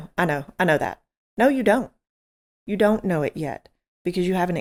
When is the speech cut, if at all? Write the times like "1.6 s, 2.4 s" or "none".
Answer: none